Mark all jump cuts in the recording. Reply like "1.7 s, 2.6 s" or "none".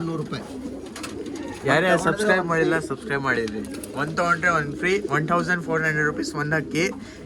none